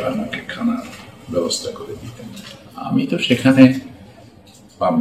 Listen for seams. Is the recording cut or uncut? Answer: cut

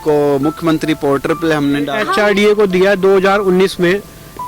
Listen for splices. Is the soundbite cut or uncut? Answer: cut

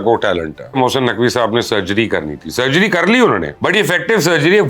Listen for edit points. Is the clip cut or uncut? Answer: cut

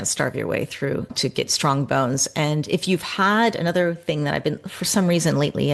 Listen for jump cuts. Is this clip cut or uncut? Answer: cut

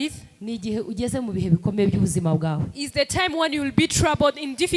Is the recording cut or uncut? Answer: uncut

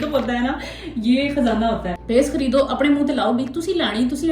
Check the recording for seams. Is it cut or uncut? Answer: cut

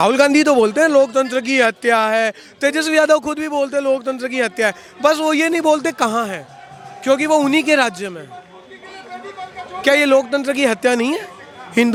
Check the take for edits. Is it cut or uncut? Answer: uncut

